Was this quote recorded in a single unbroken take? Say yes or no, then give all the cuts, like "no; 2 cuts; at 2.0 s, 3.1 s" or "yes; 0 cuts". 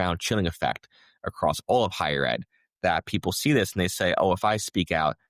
yes; 0 cuts